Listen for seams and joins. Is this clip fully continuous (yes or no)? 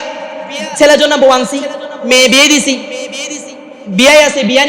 yes